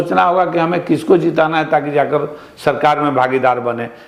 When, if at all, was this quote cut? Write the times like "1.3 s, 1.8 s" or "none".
none